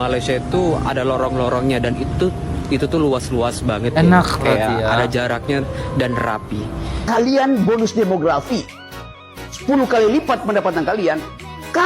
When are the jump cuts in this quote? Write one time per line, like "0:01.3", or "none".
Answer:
0:07.0